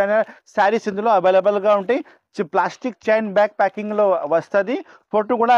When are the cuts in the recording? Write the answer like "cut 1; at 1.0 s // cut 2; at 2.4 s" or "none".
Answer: none